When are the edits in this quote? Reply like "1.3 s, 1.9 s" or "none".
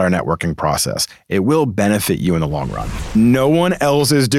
3.1 s